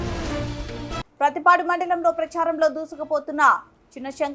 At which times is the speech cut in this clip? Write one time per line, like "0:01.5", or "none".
0:00.9